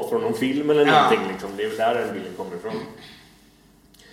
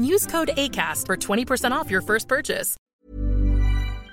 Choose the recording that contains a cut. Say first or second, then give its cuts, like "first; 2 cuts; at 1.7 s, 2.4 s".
second; 1 cut; at 2.9 s